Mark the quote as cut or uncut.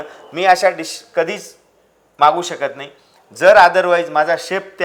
uncut